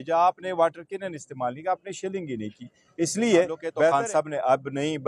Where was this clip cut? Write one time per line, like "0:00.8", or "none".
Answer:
0:03.9